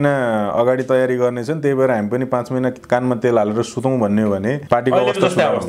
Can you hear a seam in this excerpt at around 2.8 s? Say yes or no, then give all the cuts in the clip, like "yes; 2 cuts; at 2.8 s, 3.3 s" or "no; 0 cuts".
no; 1 cut; at 4.6 s